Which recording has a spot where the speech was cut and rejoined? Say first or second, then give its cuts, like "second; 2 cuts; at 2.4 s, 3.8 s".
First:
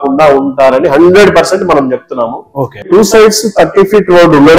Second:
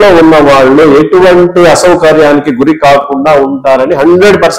first; 1 cut; at 2.9 s